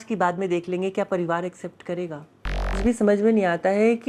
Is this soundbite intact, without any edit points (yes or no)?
no